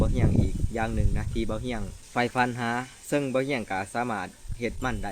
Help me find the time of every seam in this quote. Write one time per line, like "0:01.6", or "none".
none